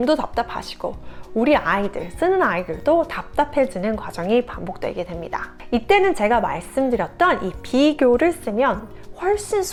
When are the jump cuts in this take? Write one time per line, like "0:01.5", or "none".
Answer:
none